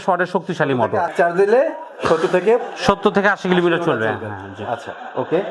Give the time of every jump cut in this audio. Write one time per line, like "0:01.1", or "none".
none